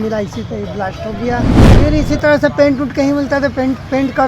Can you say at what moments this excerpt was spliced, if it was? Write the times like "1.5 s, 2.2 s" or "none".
1.7 s